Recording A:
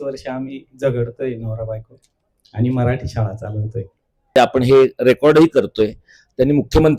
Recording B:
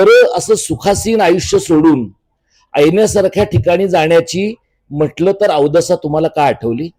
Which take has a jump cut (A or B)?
A